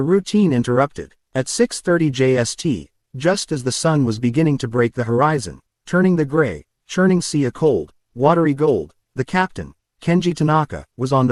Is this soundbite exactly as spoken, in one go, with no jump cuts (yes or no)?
yes